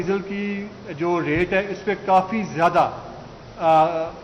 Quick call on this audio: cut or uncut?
uncut